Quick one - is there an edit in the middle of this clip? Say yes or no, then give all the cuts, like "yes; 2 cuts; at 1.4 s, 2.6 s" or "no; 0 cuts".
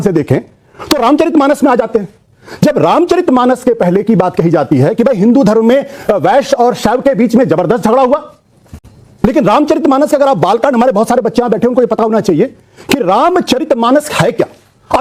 no; 0 cuts